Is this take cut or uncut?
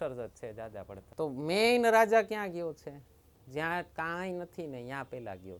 cut